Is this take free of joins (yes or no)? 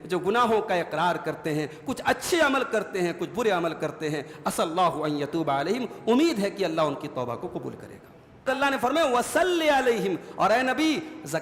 no